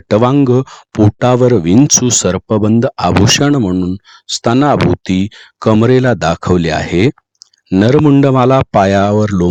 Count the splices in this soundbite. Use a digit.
0